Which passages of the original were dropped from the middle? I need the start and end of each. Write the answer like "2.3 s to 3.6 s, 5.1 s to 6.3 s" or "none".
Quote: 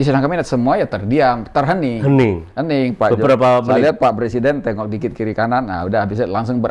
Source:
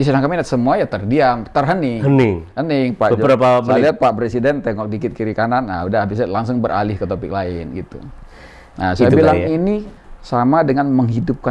none